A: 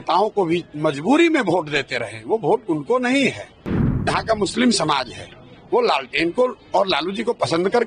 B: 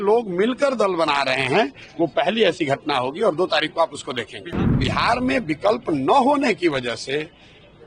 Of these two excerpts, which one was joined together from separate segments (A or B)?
B